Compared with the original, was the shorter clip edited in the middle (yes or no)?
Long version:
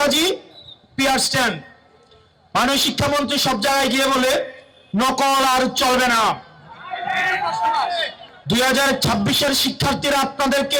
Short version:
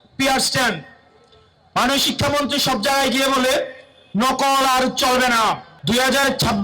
yes